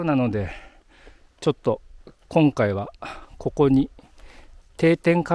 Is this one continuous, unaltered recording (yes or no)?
yes